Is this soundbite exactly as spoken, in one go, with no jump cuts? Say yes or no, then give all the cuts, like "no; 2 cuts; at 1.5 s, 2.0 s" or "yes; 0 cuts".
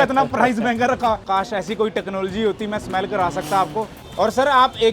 no; 2 cuts; at 1.2 s, 4.0 s